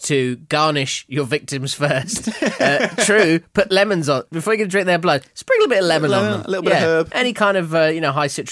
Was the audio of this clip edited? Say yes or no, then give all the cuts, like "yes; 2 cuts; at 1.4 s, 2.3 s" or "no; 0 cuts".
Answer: no; 0 cuts